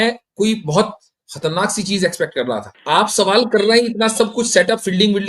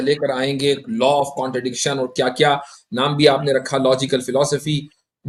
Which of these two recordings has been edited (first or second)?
first